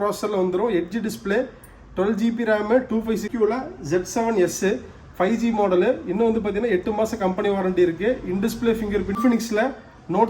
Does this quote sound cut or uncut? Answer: cut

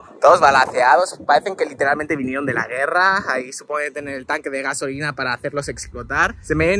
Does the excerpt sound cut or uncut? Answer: uncut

